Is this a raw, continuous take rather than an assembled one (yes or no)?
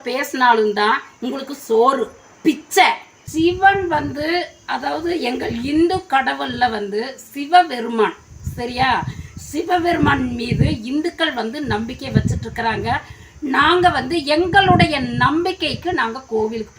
no